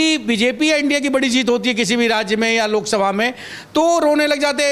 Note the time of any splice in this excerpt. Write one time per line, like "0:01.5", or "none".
none